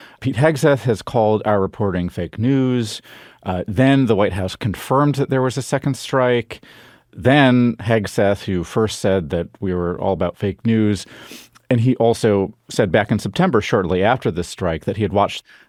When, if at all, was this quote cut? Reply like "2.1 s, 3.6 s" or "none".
none